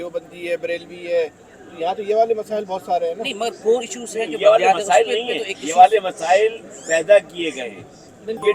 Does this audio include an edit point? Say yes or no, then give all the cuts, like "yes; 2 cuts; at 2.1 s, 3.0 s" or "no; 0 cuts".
no; 0 cuts